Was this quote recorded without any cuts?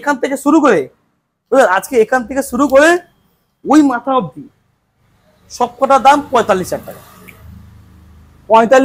yes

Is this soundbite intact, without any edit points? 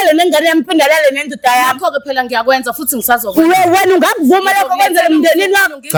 yes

